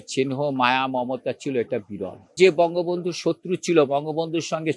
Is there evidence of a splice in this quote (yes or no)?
yes